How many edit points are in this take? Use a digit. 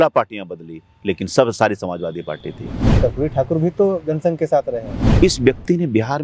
2